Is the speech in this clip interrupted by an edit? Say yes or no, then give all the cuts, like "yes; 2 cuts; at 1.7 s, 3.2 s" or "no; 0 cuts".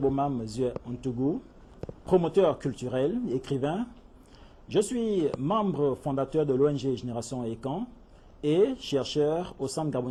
no; 0 cuts